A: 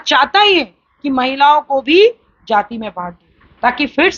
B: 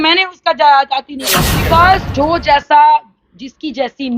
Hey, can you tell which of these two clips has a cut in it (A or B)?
B